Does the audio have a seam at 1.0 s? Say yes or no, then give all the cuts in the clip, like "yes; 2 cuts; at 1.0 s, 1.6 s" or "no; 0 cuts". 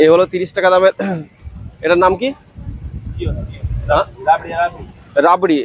no; 0 cuts